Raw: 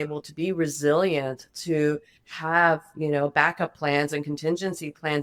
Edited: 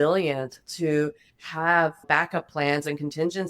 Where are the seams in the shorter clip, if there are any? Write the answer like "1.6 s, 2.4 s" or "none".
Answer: 2.1 s